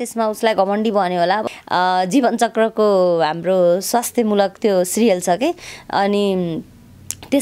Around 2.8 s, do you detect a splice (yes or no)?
no